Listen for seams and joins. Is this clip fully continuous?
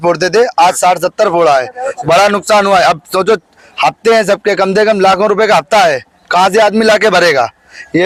yes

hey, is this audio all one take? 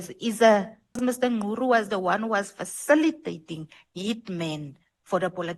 no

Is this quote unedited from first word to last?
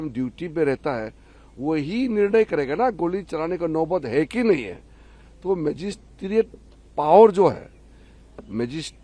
yes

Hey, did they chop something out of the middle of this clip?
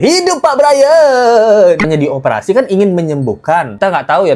yes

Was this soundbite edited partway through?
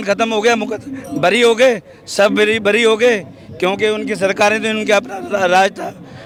no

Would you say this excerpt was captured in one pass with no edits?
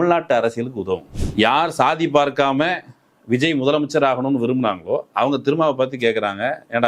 no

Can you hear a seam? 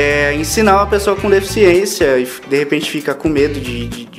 no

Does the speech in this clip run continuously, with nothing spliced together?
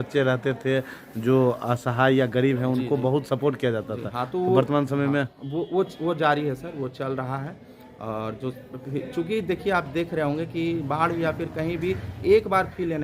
yes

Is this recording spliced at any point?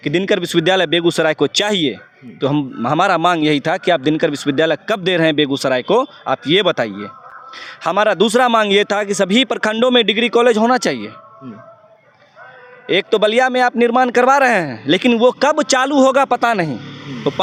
no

